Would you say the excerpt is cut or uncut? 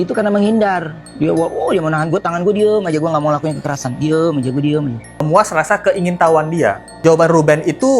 cut